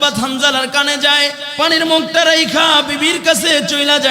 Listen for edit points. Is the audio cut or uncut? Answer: cut